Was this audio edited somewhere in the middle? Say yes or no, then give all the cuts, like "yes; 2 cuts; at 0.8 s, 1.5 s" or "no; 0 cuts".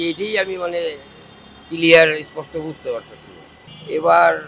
no; 0 cuts